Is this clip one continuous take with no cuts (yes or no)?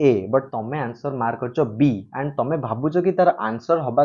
yes